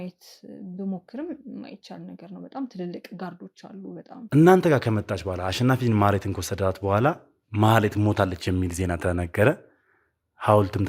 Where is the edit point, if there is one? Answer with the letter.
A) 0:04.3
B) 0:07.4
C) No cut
A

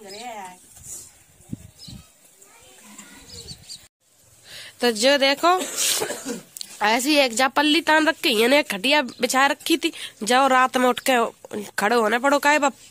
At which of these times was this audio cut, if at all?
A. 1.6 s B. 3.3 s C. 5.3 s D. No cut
D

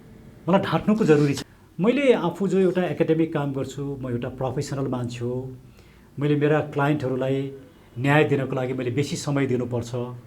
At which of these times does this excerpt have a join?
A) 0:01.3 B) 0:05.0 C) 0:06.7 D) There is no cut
A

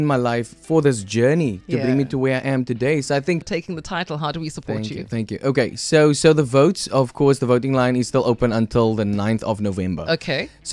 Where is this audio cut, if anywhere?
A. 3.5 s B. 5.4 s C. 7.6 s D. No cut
A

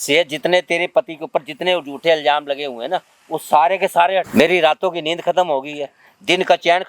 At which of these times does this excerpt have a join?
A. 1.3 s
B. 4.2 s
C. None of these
B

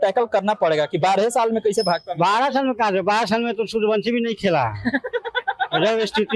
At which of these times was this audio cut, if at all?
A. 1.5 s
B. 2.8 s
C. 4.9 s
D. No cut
D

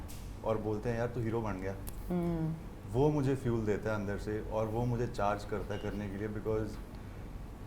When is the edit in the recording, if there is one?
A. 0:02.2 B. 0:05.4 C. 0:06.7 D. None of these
D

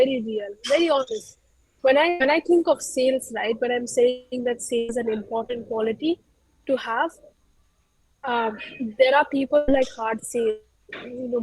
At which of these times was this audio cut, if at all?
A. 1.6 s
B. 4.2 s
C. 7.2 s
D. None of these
A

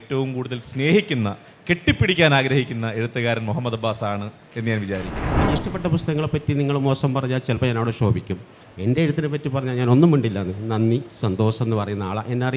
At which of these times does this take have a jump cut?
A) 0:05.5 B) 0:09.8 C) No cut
A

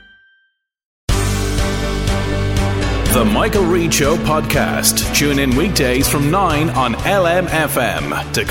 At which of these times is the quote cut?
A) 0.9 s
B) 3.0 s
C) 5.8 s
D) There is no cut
A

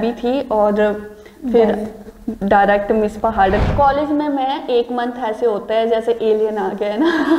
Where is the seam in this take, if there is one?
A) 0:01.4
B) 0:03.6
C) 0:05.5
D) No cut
B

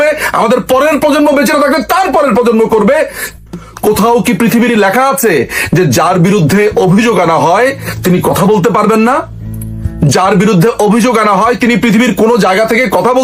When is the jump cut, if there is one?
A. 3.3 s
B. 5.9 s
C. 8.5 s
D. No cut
A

